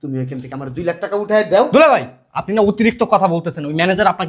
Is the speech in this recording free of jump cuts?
yes; 0 cuts

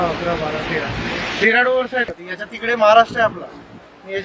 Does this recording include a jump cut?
yes; 1 cut; at 2.1 s

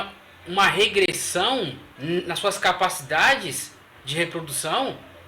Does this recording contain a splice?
yes; 1 cut; at 1.9 s

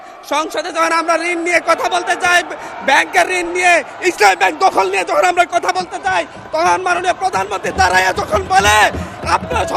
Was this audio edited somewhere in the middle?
no; 0 cuts

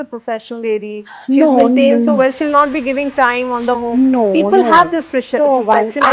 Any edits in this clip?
no; 0 cuts

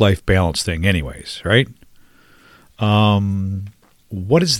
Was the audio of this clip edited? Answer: no; 0 cuts

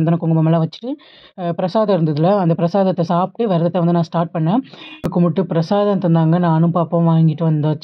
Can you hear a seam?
yes; 1 cut; at 5.1 s

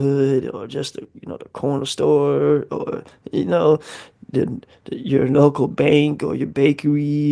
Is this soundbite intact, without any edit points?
yes; 0 cuts

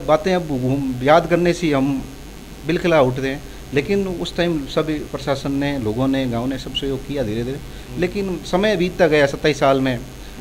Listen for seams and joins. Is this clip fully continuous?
yes; 0 cuts

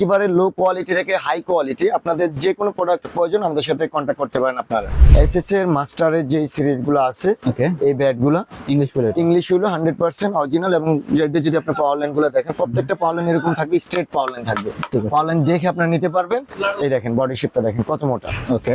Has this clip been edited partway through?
yes; 2 cuts; at 5.0 s, 16.5 s

